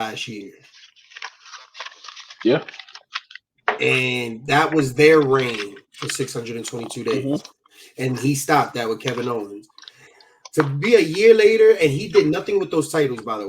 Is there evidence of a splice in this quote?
no; 0 cuts

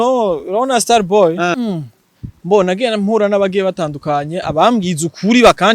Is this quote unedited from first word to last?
no; 1 cut; at 1.6 s

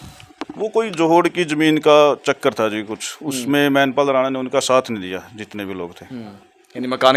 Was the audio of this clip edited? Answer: no; 0 cuts

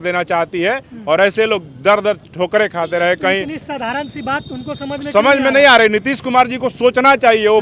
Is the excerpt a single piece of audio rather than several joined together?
yes; 0 cuts

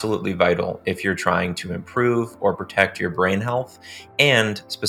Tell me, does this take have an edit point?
no; 0 cuts

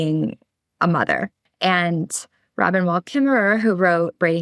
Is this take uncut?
no; 1 cut; at 1.4 s

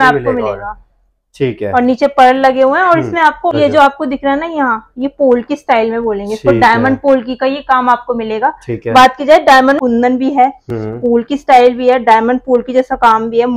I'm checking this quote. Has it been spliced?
yes; 2 cuts; at 3.5 s, 9.8 s

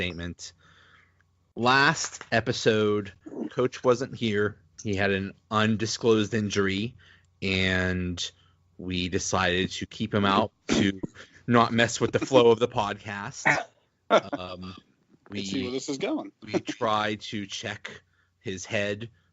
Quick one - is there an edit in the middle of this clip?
yes; 1 cut; at 4.7 s

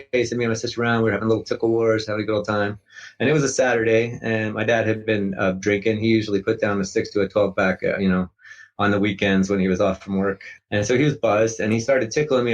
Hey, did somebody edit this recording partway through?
yes; 1 cut; at 10.5 s

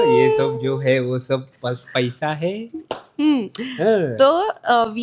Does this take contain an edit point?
no; 0 cuts

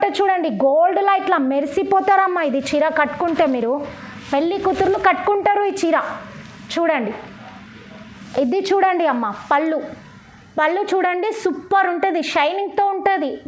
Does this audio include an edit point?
no; 0 cuts

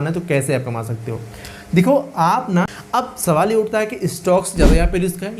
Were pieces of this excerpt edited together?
yes; 1 cut; at 2.8 s

